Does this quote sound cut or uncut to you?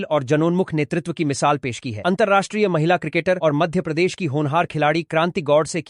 uncut